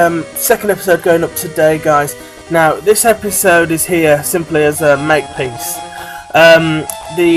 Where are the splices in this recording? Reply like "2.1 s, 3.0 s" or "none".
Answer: none